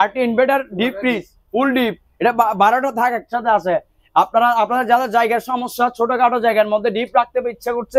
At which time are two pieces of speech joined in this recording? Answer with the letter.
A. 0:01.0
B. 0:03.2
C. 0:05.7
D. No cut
D